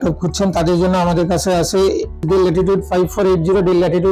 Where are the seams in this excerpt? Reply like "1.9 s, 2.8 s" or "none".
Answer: 2.2 s